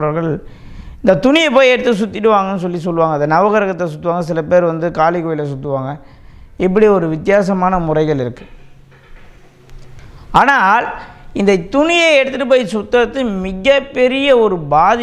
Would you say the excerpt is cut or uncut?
uncut